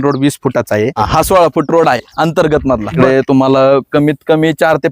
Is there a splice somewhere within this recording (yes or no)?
yes